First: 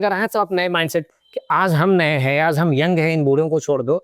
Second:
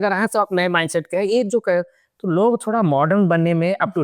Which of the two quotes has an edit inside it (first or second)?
first